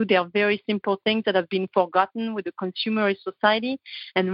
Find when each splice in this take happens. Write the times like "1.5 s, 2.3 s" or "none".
none